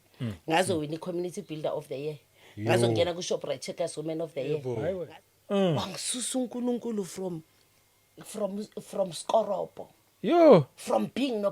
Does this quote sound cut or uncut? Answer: cut